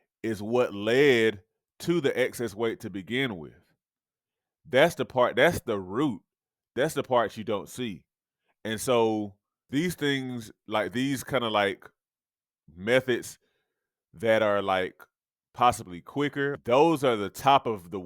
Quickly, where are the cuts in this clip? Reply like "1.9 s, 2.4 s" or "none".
9.7 s, 16.6 s